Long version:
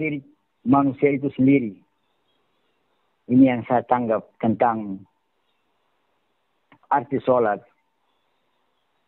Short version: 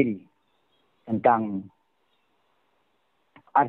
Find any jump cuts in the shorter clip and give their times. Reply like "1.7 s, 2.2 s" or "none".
1.0 s